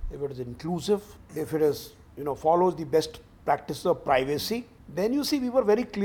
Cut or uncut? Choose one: cut